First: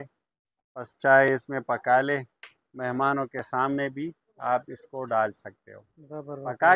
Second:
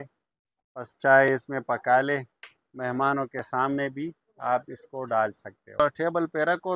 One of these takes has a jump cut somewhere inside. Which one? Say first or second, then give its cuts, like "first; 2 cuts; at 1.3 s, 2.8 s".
second; 1 cut; at 5.8 s